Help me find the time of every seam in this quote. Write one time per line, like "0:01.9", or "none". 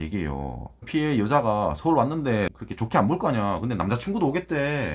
0:00.9
0:02.5